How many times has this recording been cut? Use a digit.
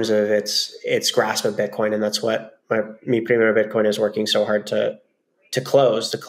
0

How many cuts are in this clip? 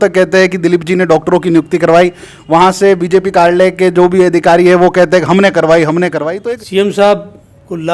1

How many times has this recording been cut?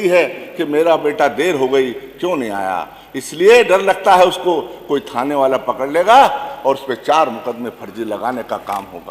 0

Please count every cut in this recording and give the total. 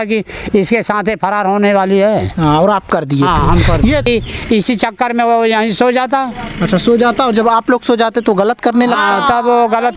1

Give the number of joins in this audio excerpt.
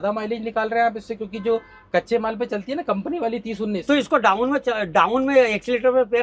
0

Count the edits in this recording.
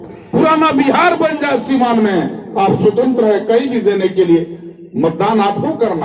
0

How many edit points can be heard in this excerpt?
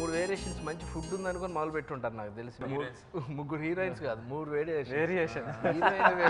1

